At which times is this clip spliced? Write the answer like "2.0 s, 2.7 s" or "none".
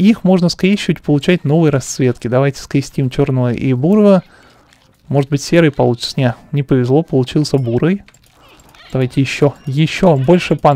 none